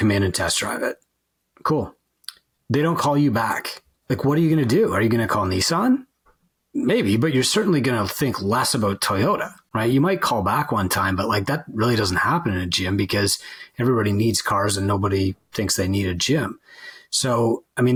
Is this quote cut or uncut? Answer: uncut